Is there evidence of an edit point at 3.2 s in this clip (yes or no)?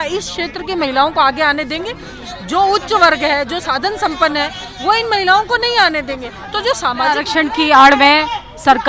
no